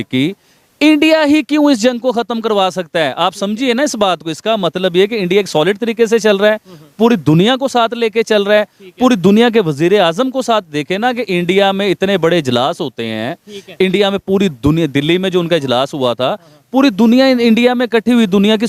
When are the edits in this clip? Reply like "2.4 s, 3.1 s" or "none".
none